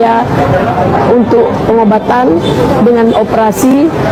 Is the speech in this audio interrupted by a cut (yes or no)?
no